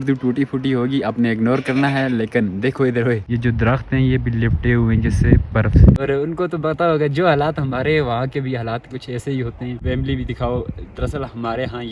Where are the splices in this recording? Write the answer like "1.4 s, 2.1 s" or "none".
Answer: 3.3 s, 6.0 s, 9.8 s

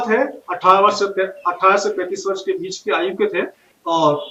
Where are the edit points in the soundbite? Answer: none

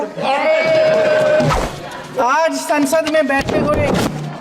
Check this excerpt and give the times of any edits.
1.6 s

